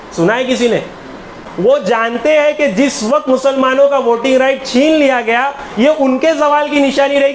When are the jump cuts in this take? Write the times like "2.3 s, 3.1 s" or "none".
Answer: 1.4 s